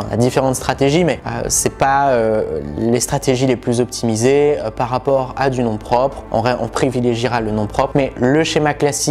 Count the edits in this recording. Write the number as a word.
zero